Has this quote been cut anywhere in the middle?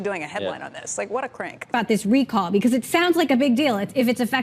yes; 1 cut; at 1.6 s

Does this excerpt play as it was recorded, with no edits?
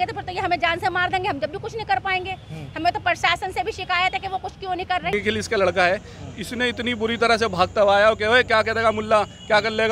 no; 1 cut; at 5.1 s

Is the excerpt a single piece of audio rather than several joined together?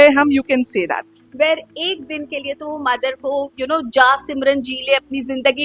no; 1 cut; at 1.2 s

